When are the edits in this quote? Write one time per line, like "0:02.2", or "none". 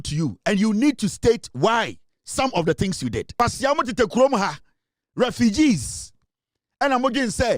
0:03.3